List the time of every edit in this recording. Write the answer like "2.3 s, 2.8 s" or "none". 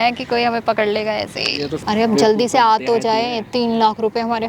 1.7 s